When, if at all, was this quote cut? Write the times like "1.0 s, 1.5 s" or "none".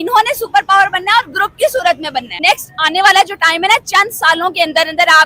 2.3 s